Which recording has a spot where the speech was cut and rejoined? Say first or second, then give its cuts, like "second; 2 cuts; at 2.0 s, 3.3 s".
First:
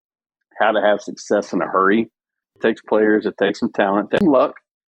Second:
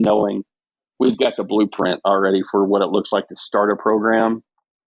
first; 2 cuts; at 2.5 s, 4.2 s